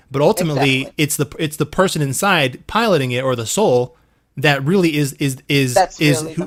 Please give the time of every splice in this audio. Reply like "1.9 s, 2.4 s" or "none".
none